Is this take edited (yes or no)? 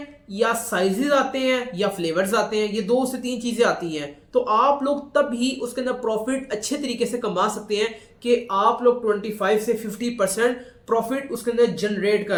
no